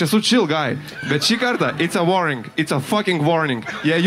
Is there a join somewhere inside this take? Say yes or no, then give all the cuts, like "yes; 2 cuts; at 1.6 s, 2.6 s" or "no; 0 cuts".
no; 0 cuts